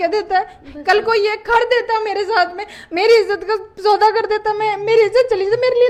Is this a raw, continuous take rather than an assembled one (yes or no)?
yes